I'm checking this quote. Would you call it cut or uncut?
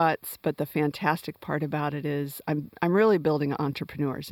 uncut